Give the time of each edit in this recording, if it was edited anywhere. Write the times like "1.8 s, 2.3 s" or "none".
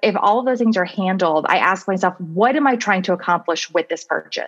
none